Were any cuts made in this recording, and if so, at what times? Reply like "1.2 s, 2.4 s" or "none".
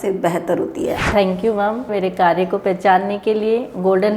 1.0 s, 1.9 s